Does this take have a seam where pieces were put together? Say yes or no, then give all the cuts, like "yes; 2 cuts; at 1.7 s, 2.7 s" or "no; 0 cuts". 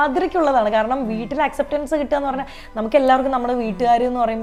no; 0 cuts